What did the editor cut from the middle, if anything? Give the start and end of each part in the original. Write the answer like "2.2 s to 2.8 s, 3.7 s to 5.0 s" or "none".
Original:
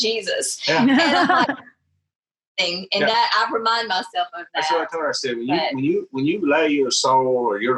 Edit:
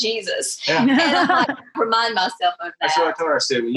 1.8 s to 3.5 s